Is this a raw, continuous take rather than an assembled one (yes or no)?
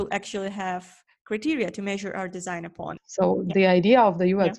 no